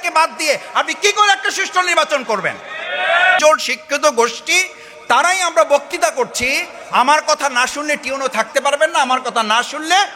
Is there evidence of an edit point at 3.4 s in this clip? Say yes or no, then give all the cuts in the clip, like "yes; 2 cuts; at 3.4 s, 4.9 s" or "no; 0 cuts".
yes; 1 cut; at 3.4 s